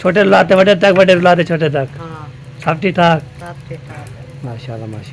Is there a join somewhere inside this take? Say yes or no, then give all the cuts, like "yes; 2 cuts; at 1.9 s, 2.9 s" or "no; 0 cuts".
no; 0 cuts